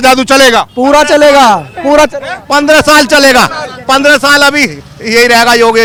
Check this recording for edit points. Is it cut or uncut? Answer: uncut